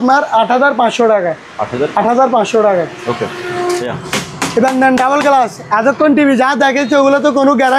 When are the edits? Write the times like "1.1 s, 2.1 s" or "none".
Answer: none